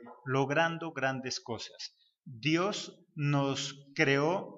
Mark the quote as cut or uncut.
uncut